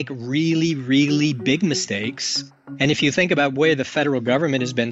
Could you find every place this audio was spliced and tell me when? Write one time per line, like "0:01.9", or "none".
0:02.5